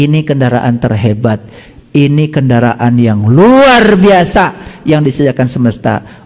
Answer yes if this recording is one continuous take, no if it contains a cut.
yes